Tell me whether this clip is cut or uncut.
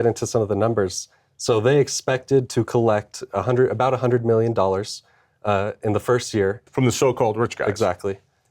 cut